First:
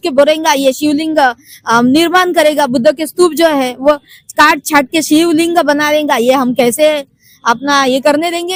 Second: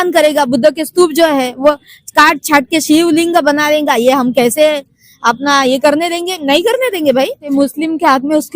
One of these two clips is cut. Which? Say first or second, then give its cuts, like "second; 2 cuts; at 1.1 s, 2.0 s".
second; 1 cut; at 7.4 s